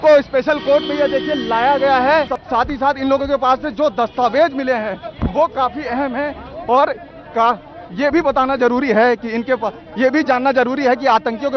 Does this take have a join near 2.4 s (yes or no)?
yes